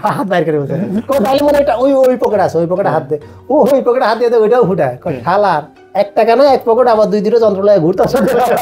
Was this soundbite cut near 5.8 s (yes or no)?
yes